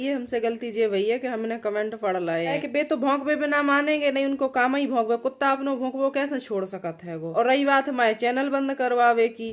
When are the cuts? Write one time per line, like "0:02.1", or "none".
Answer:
0:02.6
0:07.3